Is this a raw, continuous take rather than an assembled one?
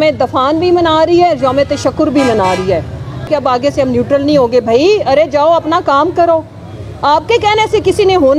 no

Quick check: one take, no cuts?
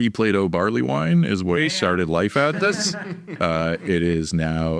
yes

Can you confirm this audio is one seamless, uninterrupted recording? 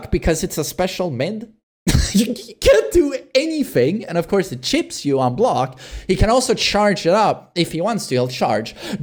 yes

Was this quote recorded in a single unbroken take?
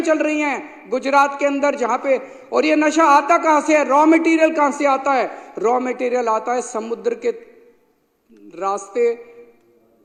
yes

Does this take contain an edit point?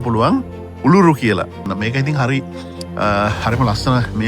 yes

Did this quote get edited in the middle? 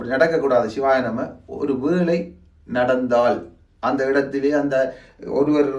no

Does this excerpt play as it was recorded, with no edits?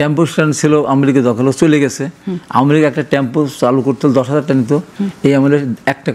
yes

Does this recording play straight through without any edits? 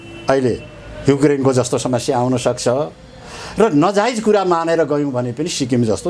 yes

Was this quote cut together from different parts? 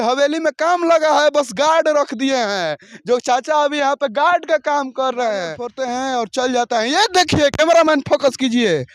yes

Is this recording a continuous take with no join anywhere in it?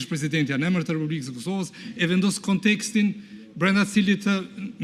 yes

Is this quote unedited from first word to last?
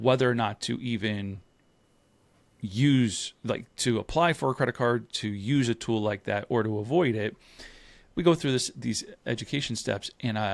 yes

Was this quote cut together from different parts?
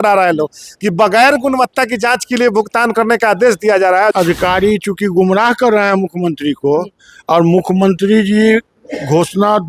yes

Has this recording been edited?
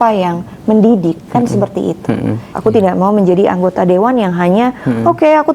yes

